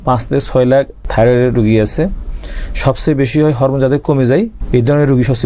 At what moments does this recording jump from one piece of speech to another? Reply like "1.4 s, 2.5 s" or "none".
1.1 s, 4.6 s